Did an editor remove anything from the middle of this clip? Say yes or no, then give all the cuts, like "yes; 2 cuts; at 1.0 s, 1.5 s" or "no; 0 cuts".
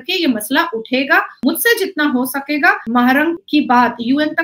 yes; 2 cuts; at 1.4 s, 3.0 s